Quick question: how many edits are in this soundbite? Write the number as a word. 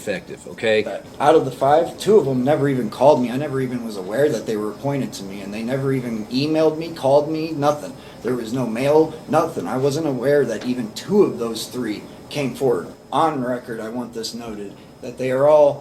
two